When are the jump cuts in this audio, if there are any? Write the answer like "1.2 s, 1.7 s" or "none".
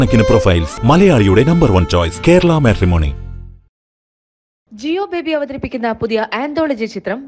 none

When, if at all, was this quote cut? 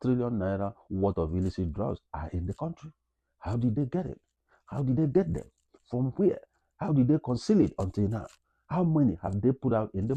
none

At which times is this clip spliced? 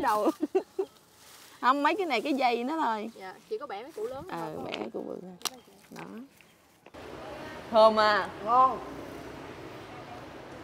7.0 s

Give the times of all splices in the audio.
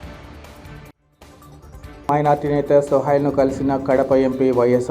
none

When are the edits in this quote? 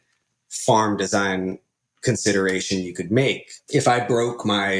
3.5 s

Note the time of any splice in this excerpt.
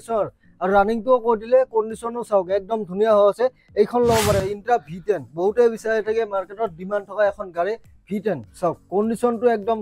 4.4 s

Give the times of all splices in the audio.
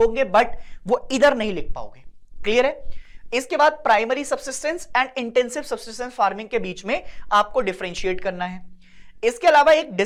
none

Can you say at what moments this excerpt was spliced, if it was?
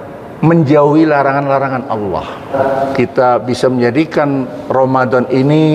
2.5 s

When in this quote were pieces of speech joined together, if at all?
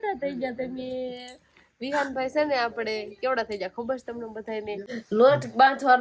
5.0 s

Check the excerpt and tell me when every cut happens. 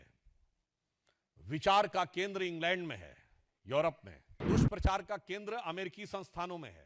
4.4 s

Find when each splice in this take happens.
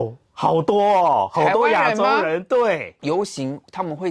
2.9 s

